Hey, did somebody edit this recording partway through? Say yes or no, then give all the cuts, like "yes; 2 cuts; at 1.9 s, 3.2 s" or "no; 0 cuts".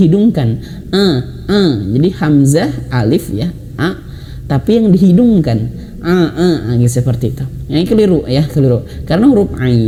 no; 0 cuts